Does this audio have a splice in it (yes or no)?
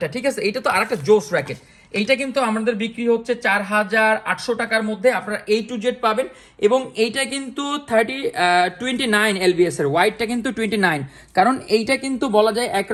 no